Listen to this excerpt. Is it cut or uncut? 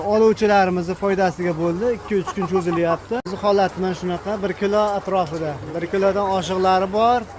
cut